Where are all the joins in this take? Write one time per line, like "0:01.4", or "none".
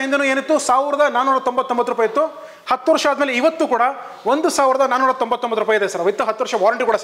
none